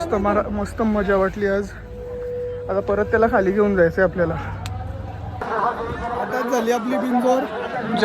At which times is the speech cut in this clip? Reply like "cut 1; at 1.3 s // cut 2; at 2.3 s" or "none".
cut 1; at 5.4 s